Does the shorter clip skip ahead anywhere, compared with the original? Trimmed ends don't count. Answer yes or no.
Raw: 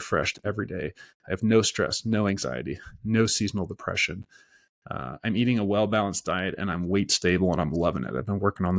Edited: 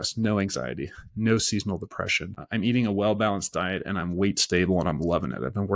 yes